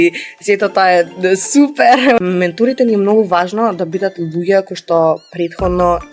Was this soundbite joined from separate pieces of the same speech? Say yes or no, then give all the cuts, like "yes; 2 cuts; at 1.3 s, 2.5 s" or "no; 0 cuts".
yes; 1 cut; at 2.2 s